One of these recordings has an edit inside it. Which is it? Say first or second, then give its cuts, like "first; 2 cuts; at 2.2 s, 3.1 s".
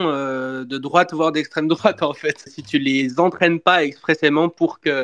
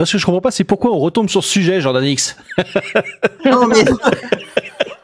first; 1 cut; at 2.6 s